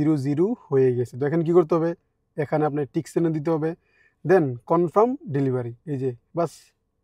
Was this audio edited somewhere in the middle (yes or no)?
no